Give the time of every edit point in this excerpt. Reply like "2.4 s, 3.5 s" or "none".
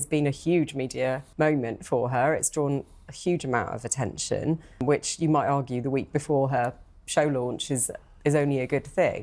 1.2 s, 4.8 s